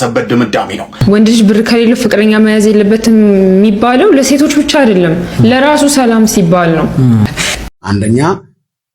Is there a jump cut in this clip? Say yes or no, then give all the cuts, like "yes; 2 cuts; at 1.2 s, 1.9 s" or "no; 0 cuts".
yes; 2 cuts; at 0.9 s, 7.6 s